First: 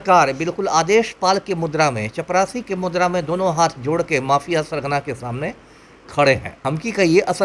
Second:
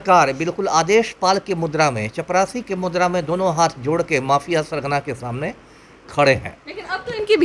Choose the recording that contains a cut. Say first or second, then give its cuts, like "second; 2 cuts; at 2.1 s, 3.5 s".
first; 1 cut; at 6.5 s